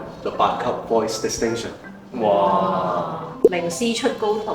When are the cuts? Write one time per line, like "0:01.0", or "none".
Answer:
0:03.6